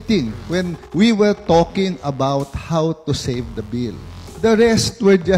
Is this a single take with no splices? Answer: yes; 0 cuts

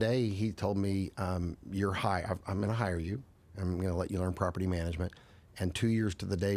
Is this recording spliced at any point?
no; 0 cuts

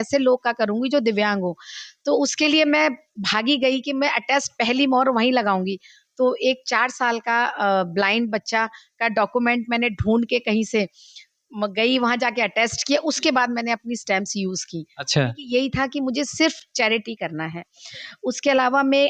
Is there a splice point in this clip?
no; 0 cuts

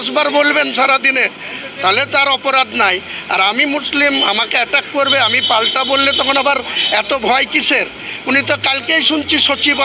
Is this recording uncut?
yes; 0 cuts

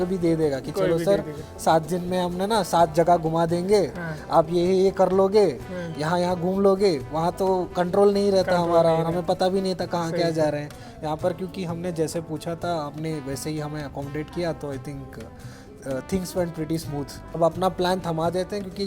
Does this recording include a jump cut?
yes; 1 cut; at 17.4 s

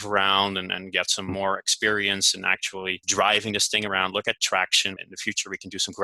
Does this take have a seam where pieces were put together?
yes; 2 cuts; at 3.0 s, 5.1 s

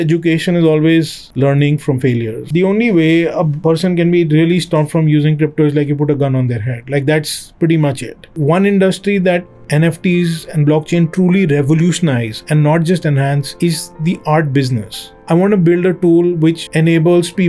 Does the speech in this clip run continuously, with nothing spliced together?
no; 3 cuts; at 2.4 s, 8.3 s, 15.1 s

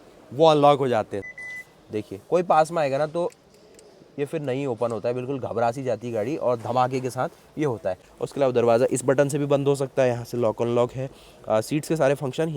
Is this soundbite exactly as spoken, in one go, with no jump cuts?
no; 2 cuts; at 1.2 s, 8.0 s

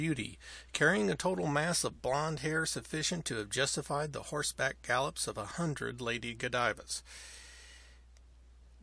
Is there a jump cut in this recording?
no; 0 cuts

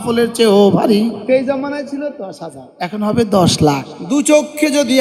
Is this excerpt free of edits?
no; 2 cuts; at 1.2 s, 3.9 s

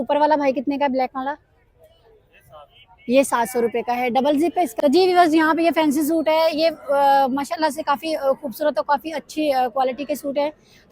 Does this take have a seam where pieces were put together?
yes; 1 cut; at 4.7 s

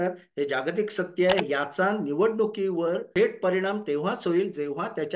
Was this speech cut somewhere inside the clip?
yes; 2 cuts; at 1.4 s, 3.1 s

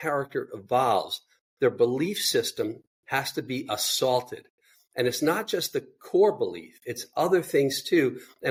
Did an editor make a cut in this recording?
no; 0 cuts

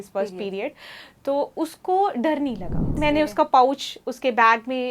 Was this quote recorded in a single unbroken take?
no; 1 cut; at 3.0 s

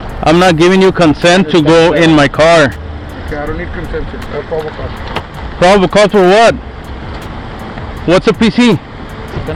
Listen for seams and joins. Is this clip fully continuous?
yes; 0 cuts

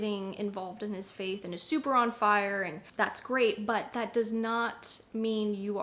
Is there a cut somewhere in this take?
no; 0 cuts

